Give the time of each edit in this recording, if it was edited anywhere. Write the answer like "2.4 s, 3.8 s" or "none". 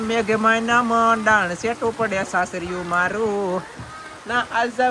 none